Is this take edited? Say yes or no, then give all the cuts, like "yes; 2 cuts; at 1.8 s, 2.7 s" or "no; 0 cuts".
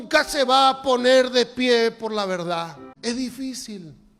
yes; 1 cut; at 2.9 s